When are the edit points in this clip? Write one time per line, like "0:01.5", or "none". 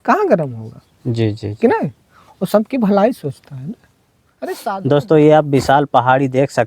0:04.5